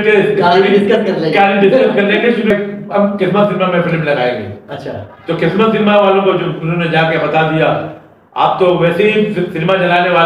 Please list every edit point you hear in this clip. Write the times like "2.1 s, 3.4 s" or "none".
2.5 s